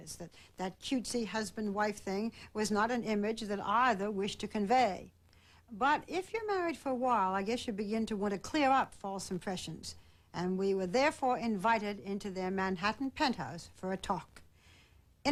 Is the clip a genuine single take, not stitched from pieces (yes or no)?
yes